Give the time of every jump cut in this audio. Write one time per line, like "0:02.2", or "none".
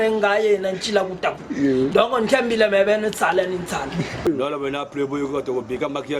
0:04.1